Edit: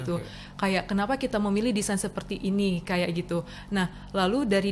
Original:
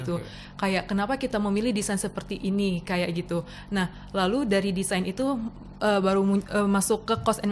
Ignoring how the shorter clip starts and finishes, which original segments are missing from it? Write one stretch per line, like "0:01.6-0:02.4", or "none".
none